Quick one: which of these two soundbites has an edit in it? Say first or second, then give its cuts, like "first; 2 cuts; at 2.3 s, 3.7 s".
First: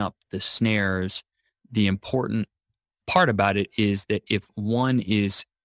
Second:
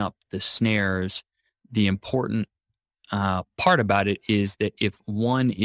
first; 1 cut; at 3.0 s